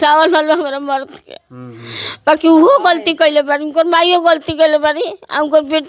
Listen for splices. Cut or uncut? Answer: uncut